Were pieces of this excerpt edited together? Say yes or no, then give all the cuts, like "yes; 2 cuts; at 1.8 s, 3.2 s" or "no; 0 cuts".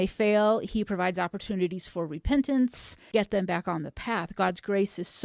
yes; 1 cut; at 3.0 s